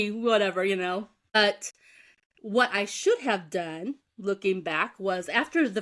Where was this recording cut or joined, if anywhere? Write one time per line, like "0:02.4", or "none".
0:01.4